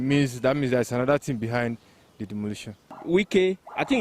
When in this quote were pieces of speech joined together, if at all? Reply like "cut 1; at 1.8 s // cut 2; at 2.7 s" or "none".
cut 1; at 3.0 s